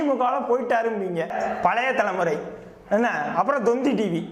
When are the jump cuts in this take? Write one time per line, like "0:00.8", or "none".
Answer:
0:01.3